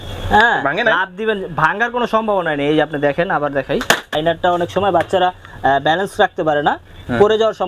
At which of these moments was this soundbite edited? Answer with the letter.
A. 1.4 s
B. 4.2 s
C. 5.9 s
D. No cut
B